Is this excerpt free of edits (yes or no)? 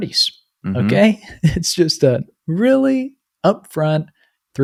yes